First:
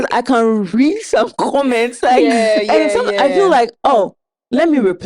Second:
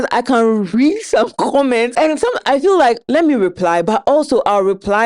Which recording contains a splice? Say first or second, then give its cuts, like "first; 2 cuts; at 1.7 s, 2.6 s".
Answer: second; 2 cuts; at 1.9 s, 3.0 s